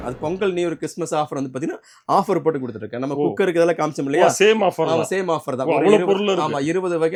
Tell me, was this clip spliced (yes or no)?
no